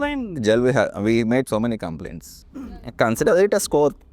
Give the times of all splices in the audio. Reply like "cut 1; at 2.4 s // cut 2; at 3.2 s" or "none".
cut 1; at 2.8 s